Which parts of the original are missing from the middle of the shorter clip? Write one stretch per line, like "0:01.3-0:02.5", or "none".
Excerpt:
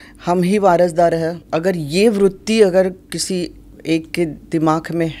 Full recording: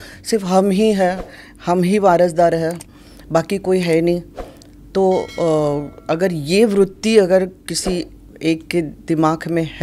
0:02.8-0:06.0